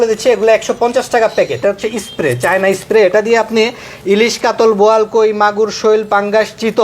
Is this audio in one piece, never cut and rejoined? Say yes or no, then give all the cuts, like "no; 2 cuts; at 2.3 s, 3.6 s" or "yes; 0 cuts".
no; 1 cut; at 1.6 s